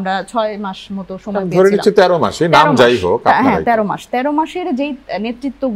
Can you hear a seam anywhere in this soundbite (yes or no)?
no